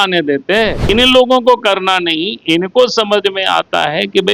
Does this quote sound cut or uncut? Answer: cut